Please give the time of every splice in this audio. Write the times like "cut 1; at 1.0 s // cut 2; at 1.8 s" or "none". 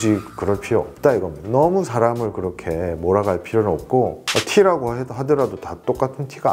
none